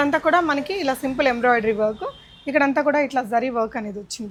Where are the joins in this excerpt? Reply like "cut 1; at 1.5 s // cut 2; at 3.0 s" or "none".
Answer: none